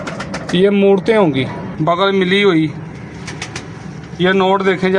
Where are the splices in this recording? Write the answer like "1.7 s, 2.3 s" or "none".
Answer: 1.6 s